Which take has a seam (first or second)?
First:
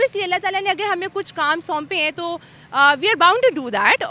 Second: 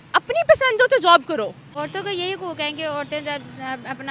second